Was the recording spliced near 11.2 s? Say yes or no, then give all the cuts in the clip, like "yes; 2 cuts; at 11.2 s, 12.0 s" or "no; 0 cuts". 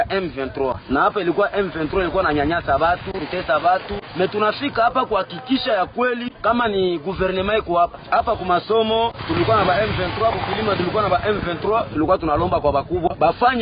no; 1 cut; at 4.4 s